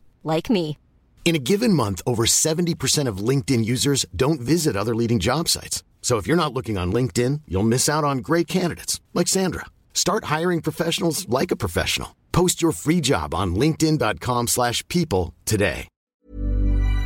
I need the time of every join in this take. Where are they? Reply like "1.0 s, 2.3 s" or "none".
16.2 s